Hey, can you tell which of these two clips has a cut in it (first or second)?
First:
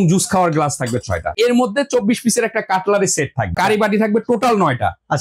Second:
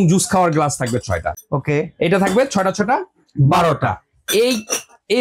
first